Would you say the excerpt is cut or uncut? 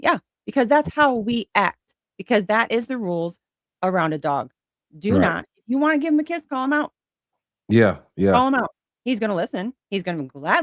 uncut